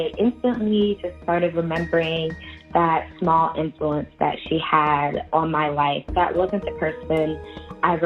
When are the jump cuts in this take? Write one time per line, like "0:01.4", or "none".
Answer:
0:06.1